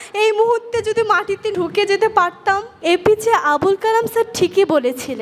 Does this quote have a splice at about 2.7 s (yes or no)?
yes